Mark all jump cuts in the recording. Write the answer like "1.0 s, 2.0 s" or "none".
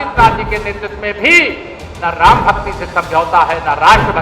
none